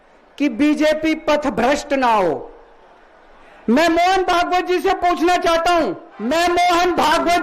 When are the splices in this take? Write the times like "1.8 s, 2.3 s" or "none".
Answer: 6.1 s